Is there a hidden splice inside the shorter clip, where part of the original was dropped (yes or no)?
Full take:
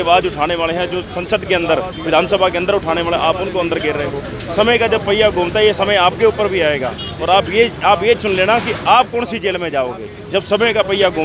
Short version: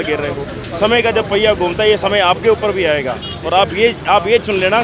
no